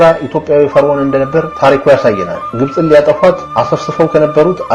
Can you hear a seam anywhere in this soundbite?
yes; 1 cut; at 2.4 s

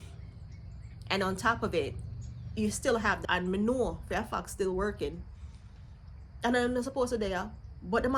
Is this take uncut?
no; 1 cut; at 3.2 s

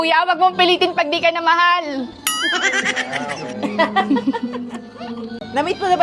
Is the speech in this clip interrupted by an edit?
no; 0 cuts

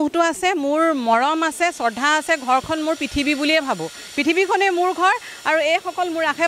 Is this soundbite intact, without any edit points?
yes; 0 cuts

